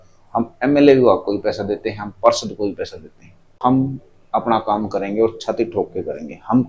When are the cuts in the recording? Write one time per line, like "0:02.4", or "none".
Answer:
0:03.6